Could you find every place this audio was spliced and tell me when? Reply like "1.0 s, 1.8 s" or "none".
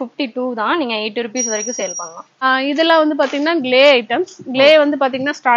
2.4 s